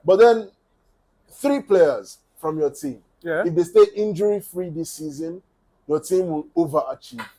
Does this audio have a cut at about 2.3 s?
no; 0 cuts

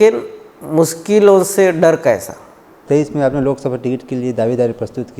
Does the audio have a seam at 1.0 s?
no; 1 cut; at 2.7 s

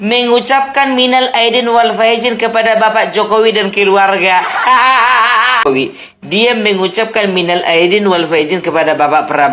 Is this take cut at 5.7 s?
yes; 1 cut; at 5.7 s

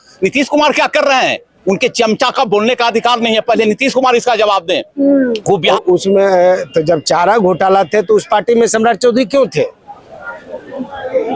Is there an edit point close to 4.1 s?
no; 1 cut; at 5.7 s

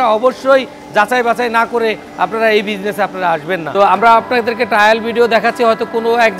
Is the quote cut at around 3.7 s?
yes; 1 cut; at 3.7 s

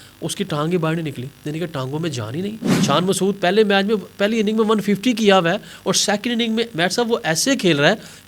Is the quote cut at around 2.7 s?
yes; 1 cut; at 2.7 s

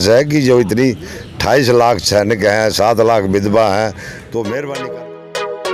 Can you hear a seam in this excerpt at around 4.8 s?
yes; 1 cut; at 4.8 s

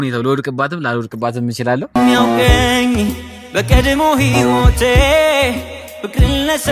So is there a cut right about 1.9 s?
yes; 1 cut; at 1.9 s

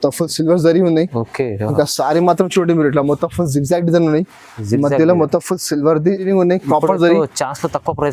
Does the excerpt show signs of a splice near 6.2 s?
yes; 1 cut; at 6.2 s

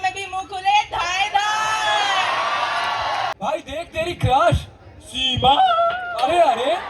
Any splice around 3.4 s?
yes; 1 cut; at 3.4 s

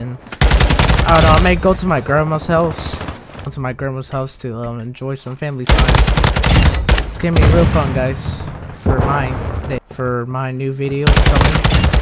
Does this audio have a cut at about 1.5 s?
no; 2 cuts; at 3.5 s, 9.8 s

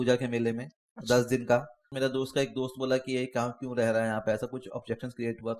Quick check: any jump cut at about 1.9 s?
yes; 1 cut; at 1.9 s

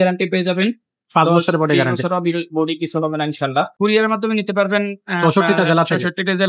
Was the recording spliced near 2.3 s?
no; 1 cut; at 3.7 s

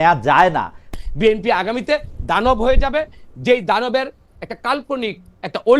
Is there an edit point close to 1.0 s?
yes; 1 cut; at 1.0 s

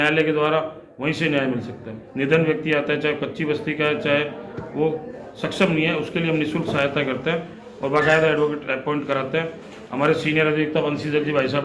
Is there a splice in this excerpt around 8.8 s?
no; 1 cut; at 1.9 s

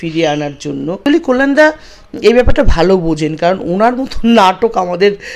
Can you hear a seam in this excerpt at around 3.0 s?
no; 1 cut; at 1.0 s

